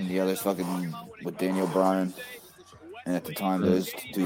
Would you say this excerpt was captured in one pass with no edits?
yes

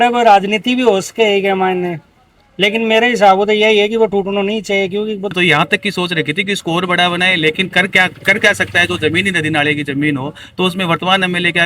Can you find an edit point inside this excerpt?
yes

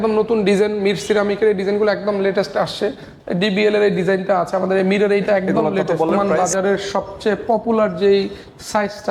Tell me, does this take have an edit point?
yes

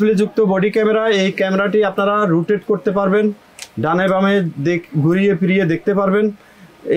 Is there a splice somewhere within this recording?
no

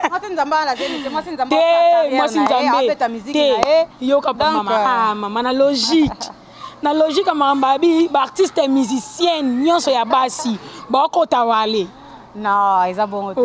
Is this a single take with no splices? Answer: yes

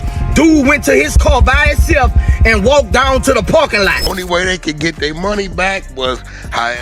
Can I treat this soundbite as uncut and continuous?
no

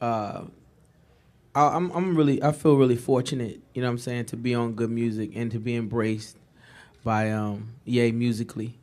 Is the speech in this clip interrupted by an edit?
no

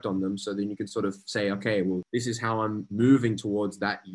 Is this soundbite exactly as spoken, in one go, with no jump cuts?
no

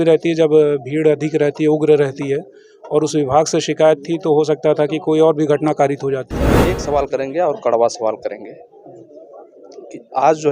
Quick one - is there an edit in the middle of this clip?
yes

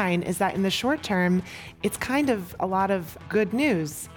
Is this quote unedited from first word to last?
no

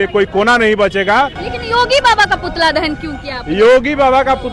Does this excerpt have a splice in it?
yes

